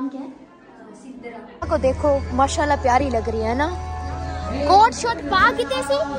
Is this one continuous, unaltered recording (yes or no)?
no